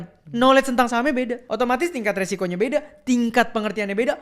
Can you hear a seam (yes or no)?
yes